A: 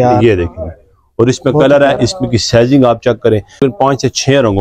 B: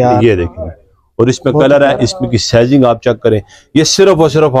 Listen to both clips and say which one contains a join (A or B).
A